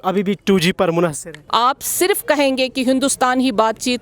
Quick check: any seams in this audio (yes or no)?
yes